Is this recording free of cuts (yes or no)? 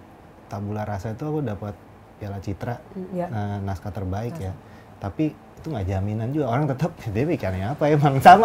yes